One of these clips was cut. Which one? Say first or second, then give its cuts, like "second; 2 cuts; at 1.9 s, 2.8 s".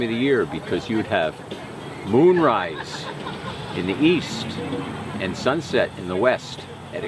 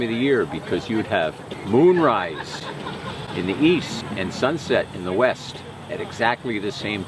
second; 2 cuts; at 1.5 s, 4.0 s